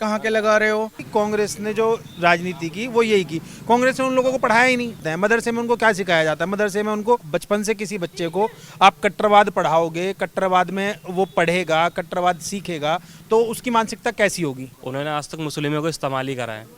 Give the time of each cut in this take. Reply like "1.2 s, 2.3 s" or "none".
1.0 s, 5.0 s, 7.2 s, 14.7 s

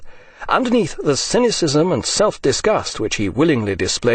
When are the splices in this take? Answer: 2.4 s

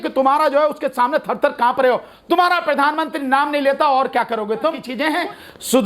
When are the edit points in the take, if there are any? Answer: 4.9 s

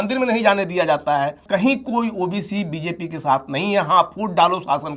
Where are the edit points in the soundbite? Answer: 1.4 s

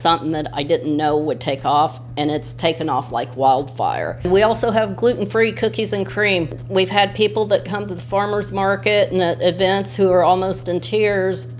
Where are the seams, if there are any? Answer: 4.5 s, 6.6 s

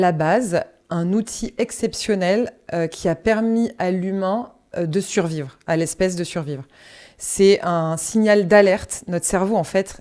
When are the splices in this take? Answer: none

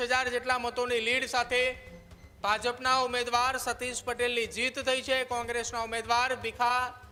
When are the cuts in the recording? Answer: none

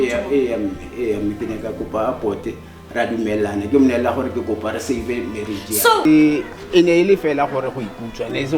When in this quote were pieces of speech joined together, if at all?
6.0 s

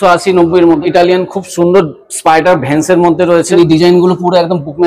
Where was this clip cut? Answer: 0.8 s, 3.5 s

